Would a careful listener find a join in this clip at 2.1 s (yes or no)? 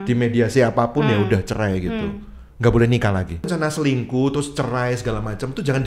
no